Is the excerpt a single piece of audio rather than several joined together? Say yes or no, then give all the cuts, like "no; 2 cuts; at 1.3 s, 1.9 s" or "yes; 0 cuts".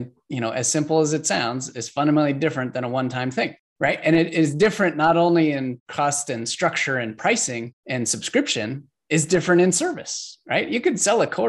yes; 0 cuts